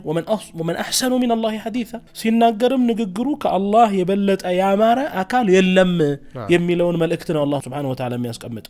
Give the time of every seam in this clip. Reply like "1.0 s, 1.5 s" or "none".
2.0 s, 7.6 s